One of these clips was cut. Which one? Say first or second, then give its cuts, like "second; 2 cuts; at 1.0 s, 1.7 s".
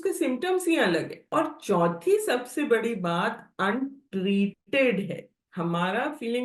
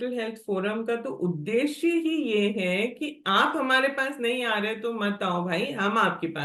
first; 2 cuts; at 1.2 s, 5.4 s